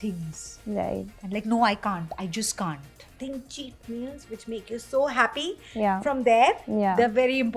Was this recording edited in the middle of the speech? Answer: yes; 1 cut; at 3.2 s

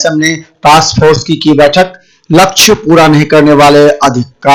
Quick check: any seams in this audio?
no; 0 cuts

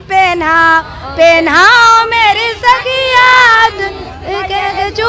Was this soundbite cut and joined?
no; 0 cuts

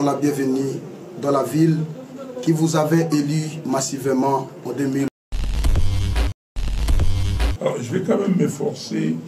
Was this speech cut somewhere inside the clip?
yes; 2 cuts; at 5.2 s, 7.6 s

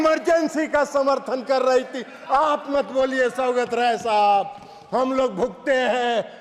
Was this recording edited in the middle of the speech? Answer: no; 0 cuts

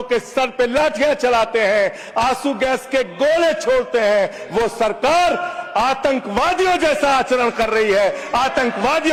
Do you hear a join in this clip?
no; 0 cuts

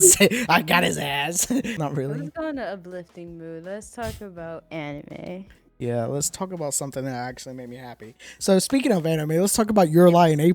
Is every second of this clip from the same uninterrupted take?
no; 1 cut; at 1.7 s

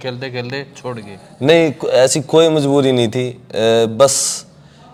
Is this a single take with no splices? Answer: yes; 0 cuts

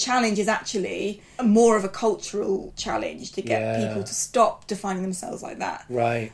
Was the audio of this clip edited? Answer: yes; 2 cuts; at 1.2 s, 2.7 s

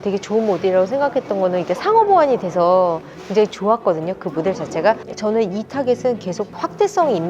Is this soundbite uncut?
no; 1 cut; at 5.0 s

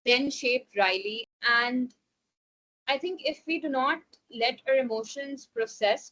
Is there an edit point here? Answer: yes; 1 cut; at 1.3 s

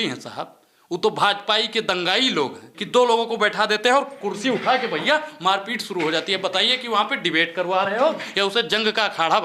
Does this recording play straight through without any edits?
no; 1 cut; at 2.7 s

